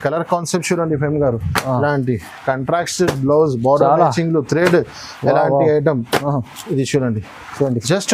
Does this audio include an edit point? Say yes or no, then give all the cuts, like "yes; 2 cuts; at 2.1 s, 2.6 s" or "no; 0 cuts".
no; 0 cuts